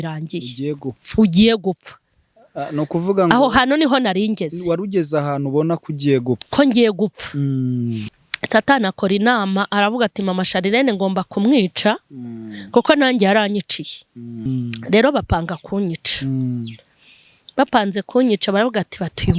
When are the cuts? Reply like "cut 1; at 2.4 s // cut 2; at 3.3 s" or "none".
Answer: cut 1; at 8.1 s // cut 2; at 14.4 s